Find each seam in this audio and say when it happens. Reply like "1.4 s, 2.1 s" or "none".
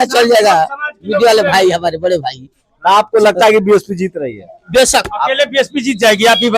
none